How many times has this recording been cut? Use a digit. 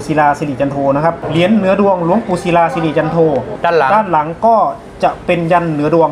2